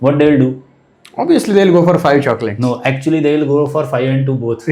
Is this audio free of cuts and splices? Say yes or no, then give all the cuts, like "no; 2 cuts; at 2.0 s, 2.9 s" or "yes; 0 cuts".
yes; 0 cuts